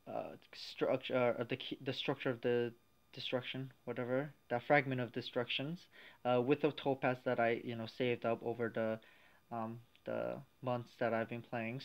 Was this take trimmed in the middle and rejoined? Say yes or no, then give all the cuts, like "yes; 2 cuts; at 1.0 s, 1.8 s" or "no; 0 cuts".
yes; 1 cut; at 8.3 s